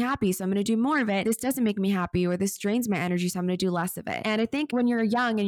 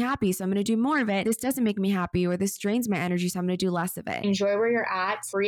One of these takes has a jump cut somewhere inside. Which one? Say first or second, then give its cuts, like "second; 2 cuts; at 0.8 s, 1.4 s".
second; 1 cut; at 4.2 s